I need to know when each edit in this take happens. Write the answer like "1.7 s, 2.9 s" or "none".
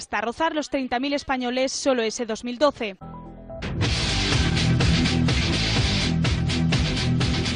2.9 s